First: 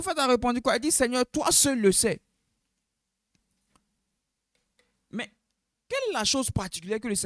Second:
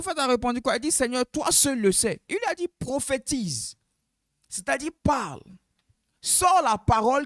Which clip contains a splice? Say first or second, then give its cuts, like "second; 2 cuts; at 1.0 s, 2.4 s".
second; 1 cut; at 2.2 s